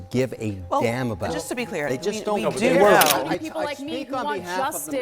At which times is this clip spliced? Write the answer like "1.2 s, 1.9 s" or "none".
3.2 s

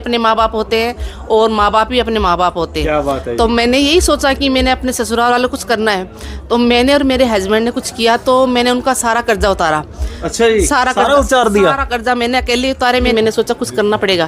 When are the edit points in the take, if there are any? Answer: 13.1 s

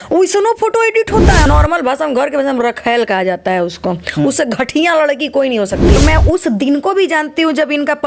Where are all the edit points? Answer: 1.4 s, 6.0 s

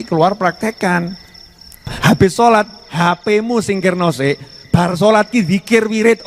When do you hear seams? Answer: 1.8 s

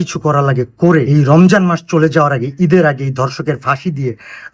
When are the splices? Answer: 1.1 s

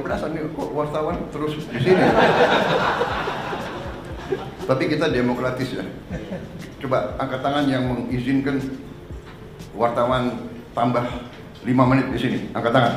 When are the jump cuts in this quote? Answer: none

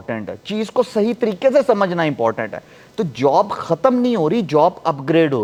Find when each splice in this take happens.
none

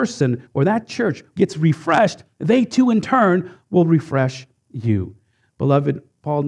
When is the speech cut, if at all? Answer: 1.2 s

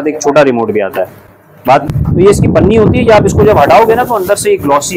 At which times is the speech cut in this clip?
1.8 s

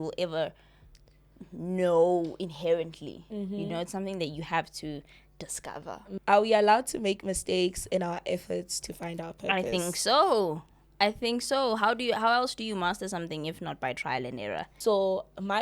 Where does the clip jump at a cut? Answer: 6.1 s, 14.7 s

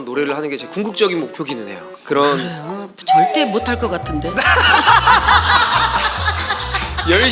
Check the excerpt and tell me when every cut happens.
none

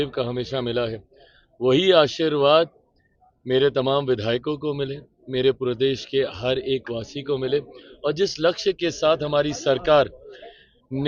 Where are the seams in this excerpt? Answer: none

